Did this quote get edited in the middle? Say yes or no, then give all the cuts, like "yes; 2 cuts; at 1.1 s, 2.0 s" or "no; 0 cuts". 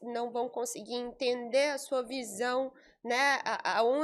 no; 0 cuts